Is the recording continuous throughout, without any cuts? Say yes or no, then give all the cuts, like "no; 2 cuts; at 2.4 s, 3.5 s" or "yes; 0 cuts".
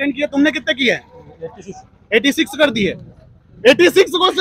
yes; 0 cuts